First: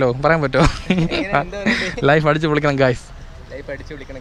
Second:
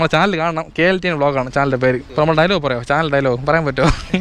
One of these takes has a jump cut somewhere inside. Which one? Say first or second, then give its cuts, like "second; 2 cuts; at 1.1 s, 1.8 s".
second; 1 cut; at 2.1 s